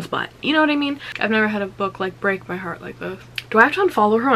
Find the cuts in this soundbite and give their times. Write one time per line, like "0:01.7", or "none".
0:01.1
0:03.3